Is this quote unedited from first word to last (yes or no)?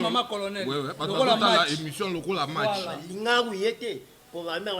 no